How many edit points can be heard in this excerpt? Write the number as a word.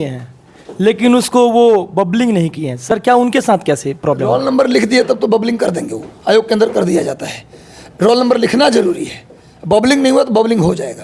zero